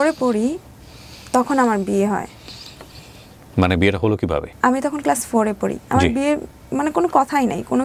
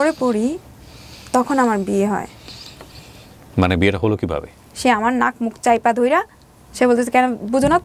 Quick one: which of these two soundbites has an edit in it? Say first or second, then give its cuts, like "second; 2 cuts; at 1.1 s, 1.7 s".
second; 1 cut; at 4.5 s